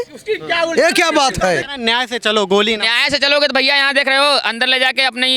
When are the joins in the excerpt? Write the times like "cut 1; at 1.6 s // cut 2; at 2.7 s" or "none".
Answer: cut 1; at 1.7 s